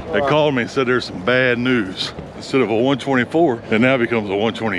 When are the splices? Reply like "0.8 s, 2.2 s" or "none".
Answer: 2.4 s, 3.6 s